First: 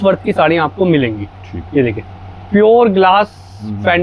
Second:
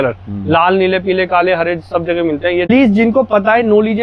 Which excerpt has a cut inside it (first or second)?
second